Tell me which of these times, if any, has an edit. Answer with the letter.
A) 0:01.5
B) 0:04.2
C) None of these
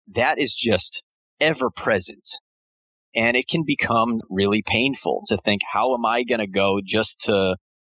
B